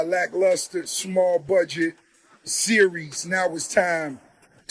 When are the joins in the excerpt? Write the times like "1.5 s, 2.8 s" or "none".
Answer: none

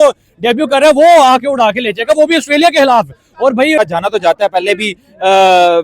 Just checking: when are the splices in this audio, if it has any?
3.8 s

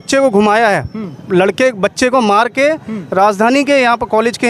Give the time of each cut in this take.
none

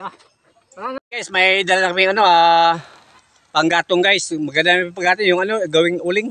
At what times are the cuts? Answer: 1.0 s

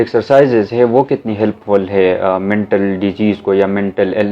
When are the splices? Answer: none

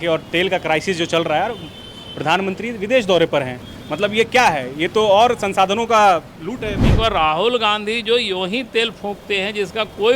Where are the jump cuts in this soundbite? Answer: 6.9 s

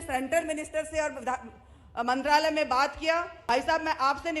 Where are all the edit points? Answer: 3.4 s

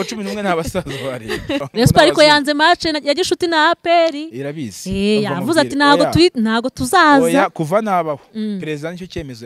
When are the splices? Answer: 1.7 s

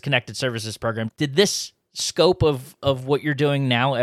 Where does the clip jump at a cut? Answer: 1.1 s

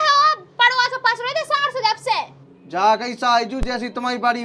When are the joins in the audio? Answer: 2.3 s

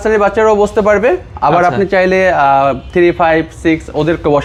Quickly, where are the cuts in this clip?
none

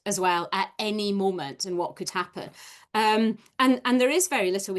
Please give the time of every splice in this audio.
none

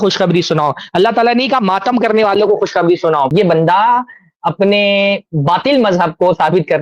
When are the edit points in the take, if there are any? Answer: 3.3 s

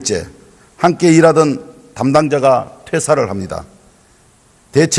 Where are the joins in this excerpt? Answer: 3.9 s

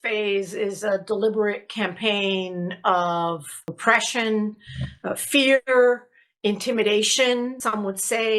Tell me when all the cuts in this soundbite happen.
3.6 s

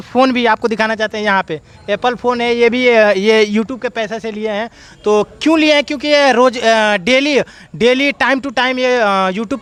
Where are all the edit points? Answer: none

